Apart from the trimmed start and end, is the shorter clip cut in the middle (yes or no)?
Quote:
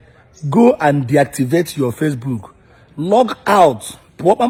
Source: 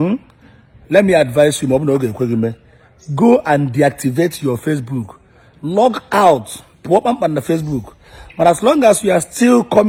no